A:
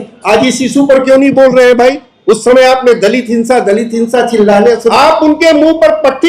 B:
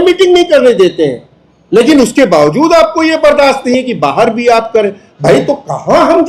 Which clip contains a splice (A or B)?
A